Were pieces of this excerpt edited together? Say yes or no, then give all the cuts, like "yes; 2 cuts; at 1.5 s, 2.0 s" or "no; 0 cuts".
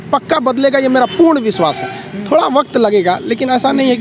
no; 0 cuts